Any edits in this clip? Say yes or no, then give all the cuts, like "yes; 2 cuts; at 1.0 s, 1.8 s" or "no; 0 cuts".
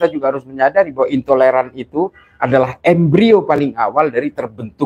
no; 0 cuts